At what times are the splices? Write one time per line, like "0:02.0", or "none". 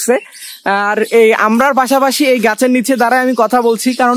none